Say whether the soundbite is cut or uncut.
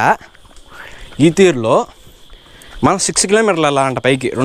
uncut